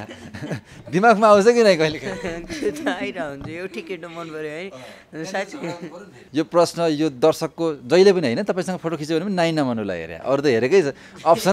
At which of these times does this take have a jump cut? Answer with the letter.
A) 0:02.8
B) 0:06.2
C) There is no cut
B